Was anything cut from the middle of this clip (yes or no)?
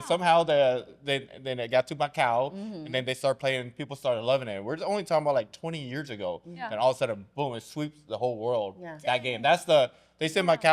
no